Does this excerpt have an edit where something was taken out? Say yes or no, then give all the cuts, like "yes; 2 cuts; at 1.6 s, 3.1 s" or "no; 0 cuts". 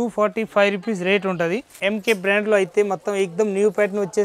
yes; 1 cut; at 1.7 s